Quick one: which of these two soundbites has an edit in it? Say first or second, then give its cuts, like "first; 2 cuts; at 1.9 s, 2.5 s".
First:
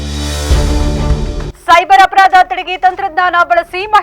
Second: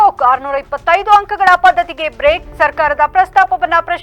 first; 1 cut; at 1.4 s